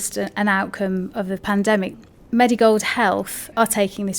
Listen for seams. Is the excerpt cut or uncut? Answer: cut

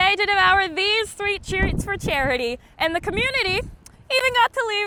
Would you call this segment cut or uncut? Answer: uncut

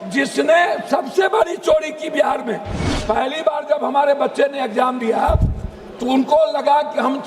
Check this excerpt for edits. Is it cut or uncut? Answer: cut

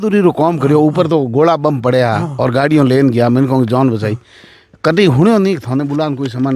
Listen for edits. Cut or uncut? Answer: uncut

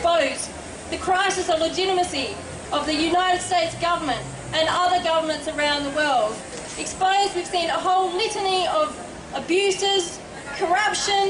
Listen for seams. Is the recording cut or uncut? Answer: cut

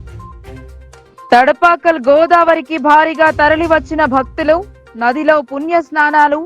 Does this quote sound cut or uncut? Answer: cut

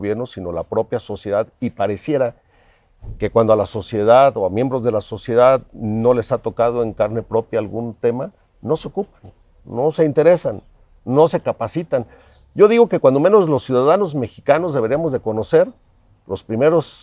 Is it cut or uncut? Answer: uncut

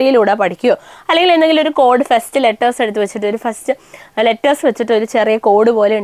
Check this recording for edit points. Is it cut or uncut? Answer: uncut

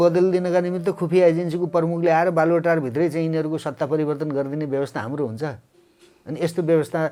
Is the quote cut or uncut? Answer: uncut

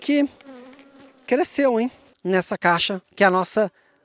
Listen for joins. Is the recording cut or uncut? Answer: cut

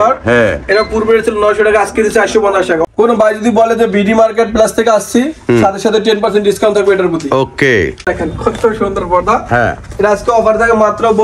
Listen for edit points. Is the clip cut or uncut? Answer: cut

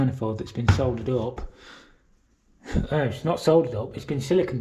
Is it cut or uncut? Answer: uncut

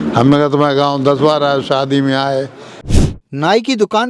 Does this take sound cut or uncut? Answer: cut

